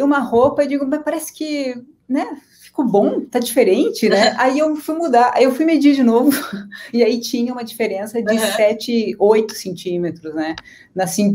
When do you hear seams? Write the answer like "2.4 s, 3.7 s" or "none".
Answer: none

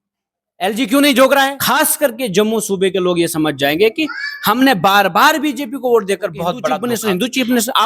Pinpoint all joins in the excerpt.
1.6 s, 6.8 s

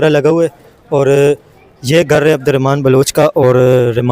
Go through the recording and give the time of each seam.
none

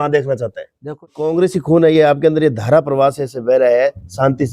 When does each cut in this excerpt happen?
1.0 s

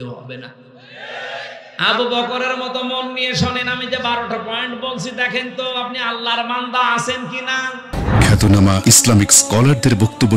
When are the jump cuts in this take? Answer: 7.8 s

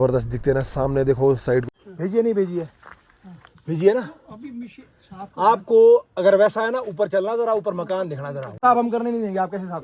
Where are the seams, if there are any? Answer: 1.6 s, 8.6 s

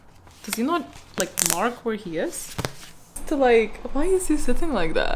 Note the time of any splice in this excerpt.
3.2 s

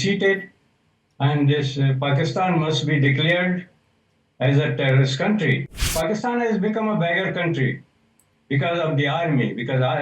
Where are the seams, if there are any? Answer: 5.9 s

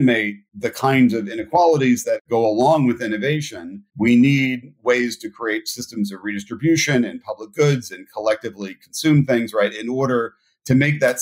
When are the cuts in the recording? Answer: none

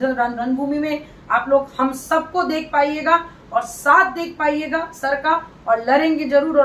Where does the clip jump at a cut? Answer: none

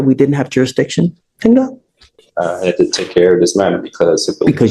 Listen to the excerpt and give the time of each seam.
none

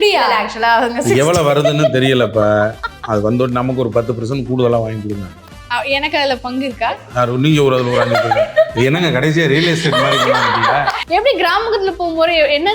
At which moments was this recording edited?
11.0 s

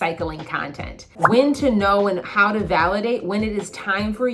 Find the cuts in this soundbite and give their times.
1.2 s

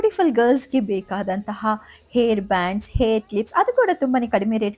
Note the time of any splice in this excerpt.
none

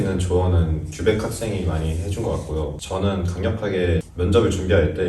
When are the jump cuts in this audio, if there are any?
2.8 s, 4.1 s

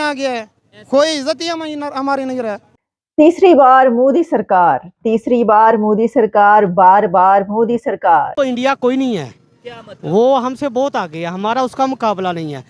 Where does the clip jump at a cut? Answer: 2.6 s, 8.3 s

